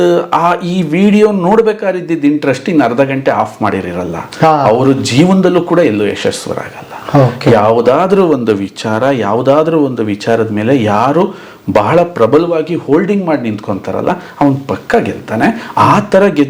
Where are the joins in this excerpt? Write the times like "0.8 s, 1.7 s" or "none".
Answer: none